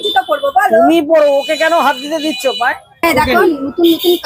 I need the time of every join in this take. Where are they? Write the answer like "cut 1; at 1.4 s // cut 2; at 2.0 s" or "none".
cut 1; at 3.0 s